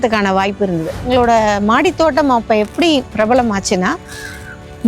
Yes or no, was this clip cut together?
yes